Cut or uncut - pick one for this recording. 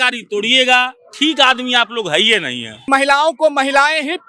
cut